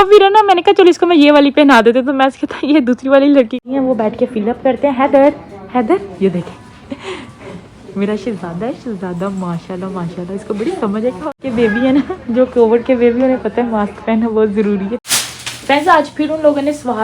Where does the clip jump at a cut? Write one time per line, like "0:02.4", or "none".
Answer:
0:03.6
0:11.4
0:15.0

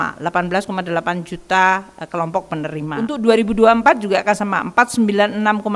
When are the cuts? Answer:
0:03.1

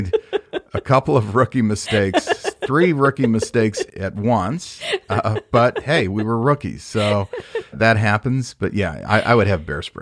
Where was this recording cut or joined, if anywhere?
0:03.9
0:07.8

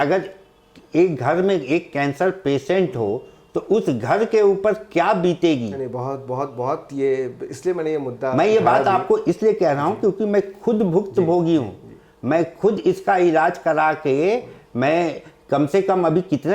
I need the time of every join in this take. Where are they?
none

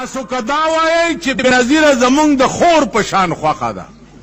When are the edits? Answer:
0:01.5

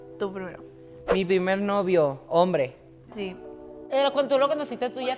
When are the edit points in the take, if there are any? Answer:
0:03.7

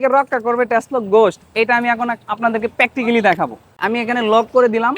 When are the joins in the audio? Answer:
0:03.7

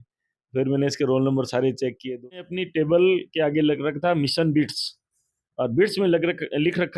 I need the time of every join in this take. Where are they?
0:02.3

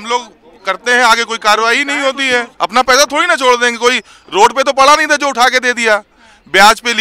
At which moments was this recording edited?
0:02.5

